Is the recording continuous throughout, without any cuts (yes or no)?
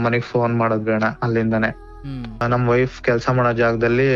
no